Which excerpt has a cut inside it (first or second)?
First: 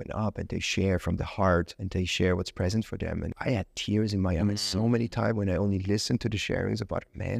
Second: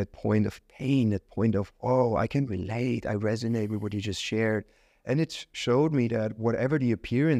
first